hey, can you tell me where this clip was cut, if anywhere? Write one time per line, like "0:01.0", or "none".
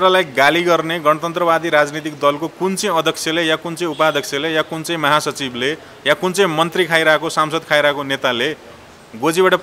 none

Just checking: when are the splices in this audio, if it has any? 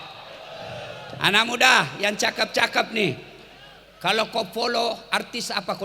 none

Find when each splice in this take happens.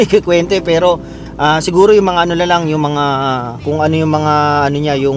0:03.5

